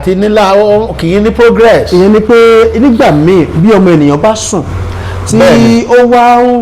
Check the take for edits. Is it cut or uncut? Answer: uncut